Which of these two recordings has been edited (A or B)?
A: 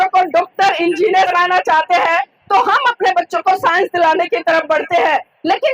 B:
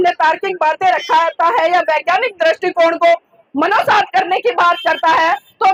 A